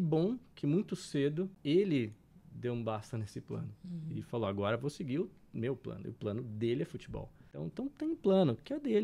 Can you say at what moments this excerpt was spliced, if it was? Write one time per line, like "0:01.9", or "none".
0:01.5
0:07.6